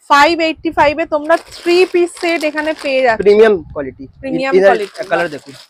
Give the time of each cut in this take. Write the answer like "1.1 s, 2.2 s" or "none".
none

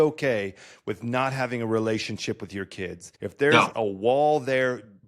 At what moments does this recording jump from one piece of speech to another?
3.1 s

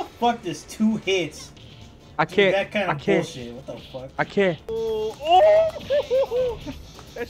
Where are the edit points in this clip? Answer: 4.6 s

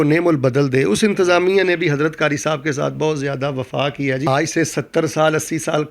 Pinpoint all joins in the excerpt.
4.3 s

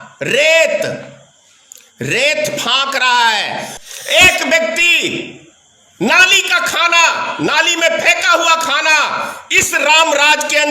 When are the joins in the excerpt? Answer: 3.8 s

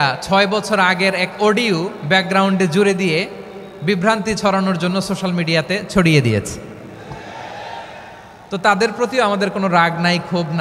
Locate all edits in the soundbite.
none

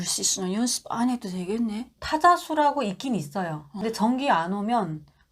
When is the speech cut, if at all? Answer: 3.8 s

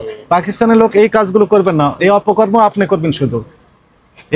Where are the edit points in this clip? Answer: none

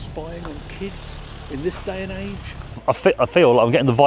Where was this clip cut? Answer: 2.8 s

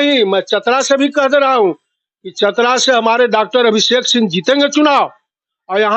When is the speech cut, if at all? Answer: none

